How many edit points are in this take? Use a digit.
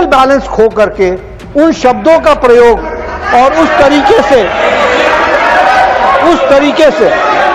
0